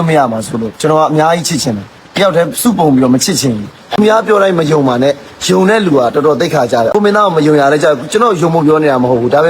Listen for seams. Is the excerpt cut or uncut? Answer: cut